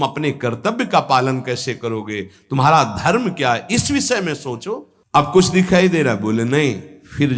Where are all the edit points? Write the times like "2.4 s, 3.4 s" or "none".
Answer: 4.9 s